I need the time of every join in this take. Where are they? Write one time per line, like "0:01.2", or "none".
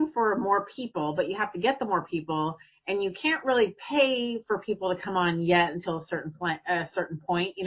none